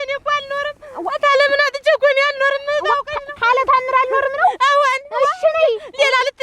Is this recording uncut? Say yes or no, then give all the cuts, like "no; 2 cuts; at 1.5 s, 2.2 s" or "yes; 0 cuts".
yes; 0 cuts